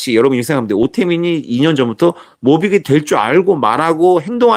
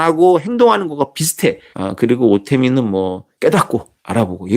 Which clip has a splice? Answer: second; 2 cuts; at 1.7 s, 3.2 s

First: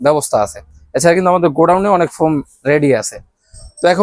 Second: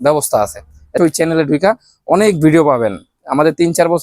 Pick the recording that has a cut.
second; 1 cut; at 0.9 s

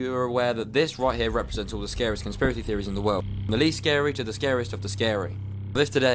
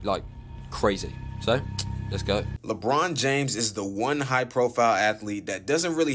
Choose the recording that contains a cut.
second; 1 cut; at 2.5 s

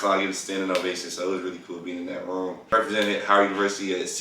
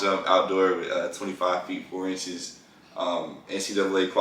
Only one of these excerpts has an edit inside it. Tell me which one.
first; 1 cut; at 2.6 s

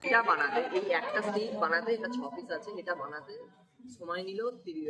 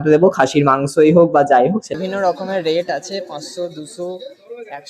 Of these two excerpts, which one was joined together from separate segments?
second; 1 cut; at 1.9 s

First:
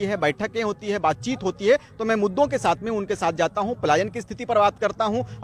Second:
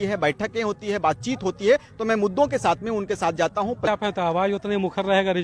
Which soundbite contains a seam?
second; 1 cut; at 3.9 s

